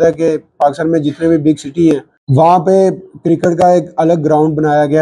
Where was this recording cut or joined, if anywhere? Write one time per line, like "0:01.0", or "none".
0:02.2

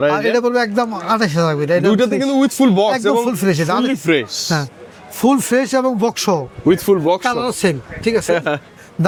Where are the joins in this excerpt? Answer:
none

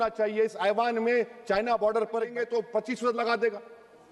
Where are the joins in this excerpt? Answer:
0:02.3

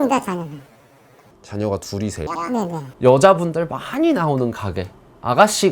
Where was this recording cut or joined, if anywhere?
0:02.8

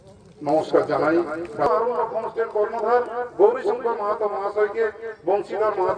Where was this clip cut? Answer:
0:01.7

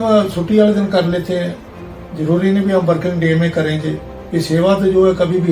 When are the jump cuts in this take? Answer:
none

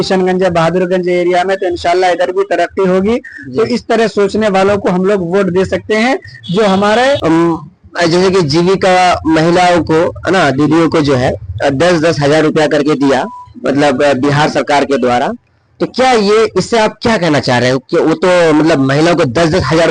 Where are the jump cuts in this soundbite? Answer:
0:07.2

